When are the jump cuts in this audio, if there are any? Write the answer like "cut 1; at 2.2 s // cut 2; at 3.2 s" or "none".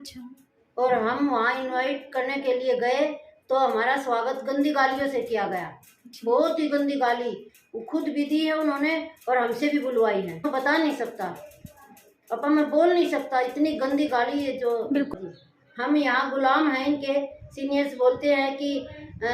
cut 1; at 10.4 s // cut 2; at 15.1 s